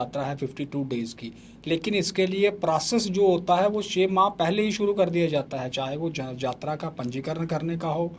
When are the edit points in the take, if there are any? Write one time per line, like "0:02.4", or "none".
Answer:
none